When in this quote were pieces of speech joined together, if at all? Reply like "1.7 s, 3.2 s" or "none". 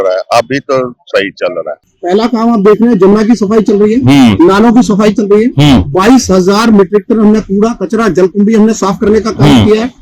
1.7 s